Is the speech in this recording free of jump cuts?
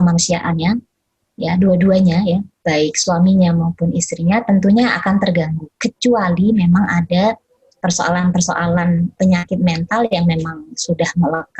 no; 1 cut; at 9.1 s

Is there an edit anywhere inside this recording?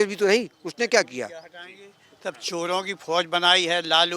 no; 0 cuts

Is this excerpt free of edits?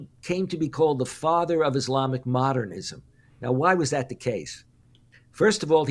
yes; 0 cuts

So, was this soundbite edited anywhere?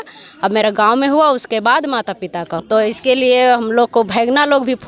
no; 0 cuts

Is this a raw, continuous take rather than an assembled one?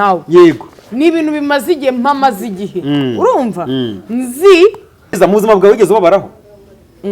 no; 1 cut; at 5.2 s

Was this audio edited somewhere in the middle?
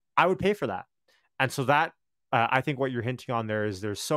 no; 0 cuts

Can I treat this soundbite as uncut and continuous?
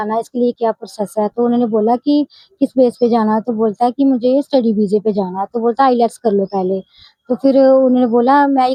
yes; 0 cuts

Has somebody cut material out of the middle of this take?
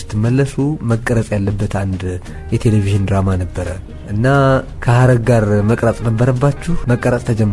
no; 0 cuts

